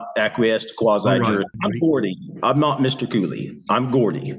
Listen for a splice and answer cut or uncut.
cut